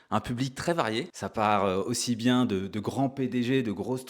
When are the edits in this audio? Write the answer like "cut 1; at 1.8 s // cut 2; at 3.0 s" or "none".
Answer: cut 1; at 1.2 s